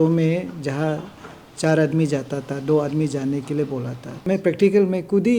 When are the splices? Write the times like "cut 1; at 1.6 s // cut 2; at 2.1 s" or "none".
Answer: cut 1; at 4.3 s